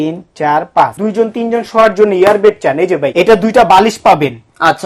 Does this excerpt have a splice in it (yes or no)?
yes